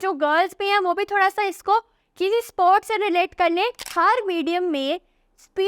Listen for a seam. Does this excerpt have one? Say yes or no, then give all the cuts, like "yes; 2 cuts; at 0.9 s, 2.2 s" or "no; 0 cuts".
yes; 1 cut; at 3.8 s